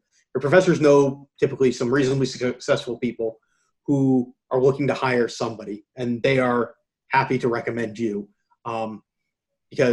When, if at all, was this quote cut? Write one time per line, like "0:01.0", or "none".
none